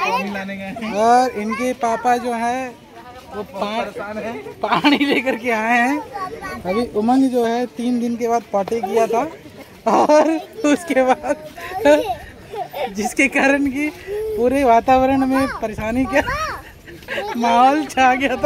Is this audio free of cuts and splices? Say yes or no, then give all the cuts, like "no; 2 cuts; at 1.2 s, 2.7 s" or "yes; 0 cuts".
yes; 0 cuts